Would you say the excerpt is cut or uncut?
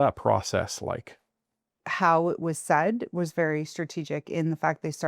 cut